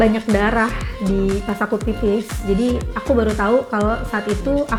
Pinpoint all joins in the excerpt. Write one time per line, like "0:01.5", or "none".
none